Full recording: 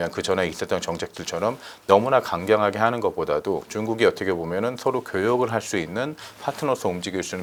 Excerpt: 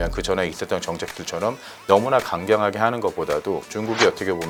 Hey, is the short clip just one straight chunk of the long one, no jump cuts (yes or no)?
yes